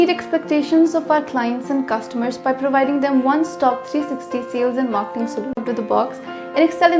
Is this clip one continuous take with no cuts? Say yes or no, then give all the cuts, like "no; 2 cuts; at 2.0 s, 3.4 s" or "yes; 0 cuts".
no; 1 cut; at 5.6 s